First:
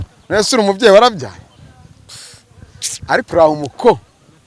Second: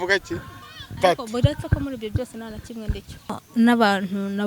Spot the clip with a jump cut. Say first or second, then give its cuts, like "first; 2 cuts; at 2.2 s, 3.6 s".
second; 1 cut; at 3.4 s